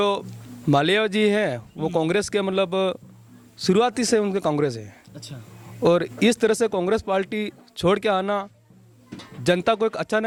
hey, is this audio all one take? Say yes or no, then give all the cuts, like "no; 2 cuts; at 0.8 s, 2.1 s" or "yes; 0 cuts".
yes; 0 cuts